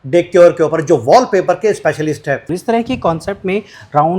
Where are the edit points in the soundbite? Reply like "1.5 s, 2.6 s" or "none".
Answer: 2.5 s